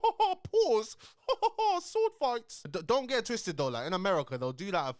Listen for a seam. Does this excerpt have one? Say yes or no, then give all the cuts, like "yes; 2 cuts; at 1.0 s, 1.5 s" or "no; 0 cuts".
no; 0 cuts